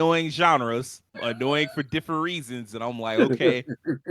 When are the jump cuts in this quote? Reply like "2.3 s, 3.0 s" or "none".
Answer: 1.2 s